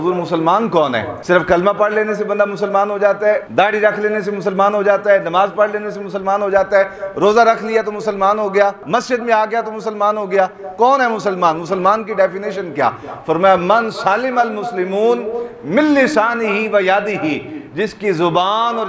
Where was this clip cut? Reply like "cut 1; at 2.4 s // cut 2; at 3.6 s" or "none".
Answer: cut 1; at 1.1 s // cut 2; at 3.5 s